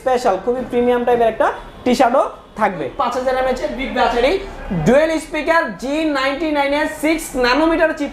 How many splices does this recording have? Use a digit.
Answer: 1